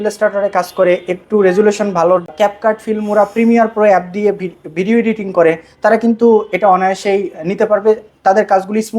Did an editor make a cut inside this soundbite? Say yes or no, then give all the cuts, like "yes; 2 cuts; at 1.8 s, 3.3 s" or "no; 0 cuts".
yes; 1 cut; at 2.3 s